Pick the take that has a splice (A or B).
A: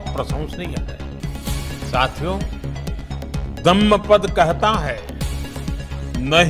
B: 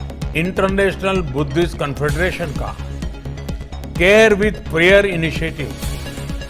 B